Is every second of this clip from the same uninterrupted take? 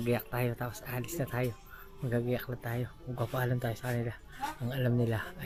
yes; 0 cuts

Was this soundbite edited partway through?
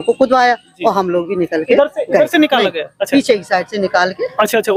no; 0 cuts

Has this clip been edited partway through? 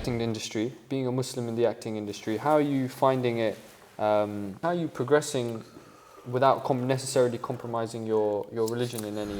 yes; 1 cut; at 4.6 s

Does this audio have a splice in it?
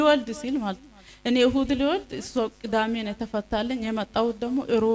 no; 0 cuts

